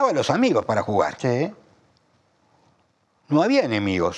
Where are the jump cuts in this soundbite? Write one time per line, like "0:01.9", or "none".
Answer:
none